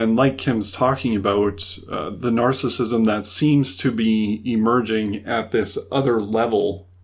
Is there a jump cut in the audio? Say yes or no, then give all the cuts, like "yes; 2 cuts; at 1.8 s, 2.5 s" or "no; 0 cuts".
no; 0 cuts